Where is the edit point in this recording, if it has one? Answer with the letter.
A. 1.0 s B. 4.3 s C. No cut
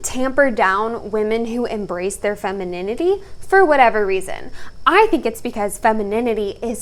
C